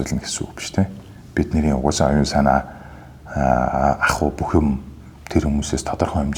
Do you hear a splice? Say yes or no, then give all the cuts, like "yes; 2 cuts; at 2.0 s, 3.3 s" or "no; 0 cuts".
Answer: no; 0 cuts